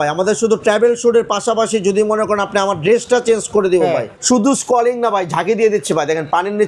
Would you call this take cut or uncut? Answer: cut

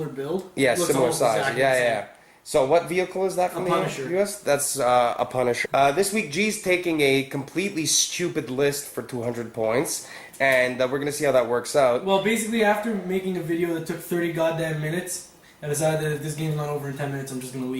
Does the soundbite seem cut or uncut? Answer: uncut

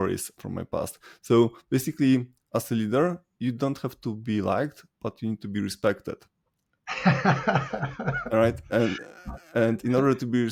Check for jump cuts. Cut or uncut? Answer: uncut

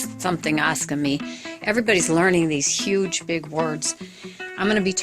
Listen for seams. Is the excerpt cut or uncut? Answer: uncut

